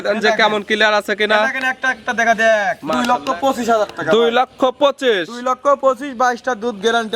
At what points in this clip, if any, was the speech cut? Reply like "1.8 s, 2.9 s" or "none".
2.9 s